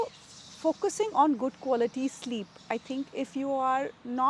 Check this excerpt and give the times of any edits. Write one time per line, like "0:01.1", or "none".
none